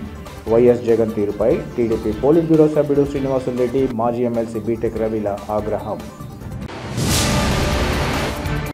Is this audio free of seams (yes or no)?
yes